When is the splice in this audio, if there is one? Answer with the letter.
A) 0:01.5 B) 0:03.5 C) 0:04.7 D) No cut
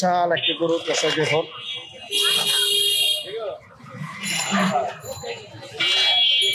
D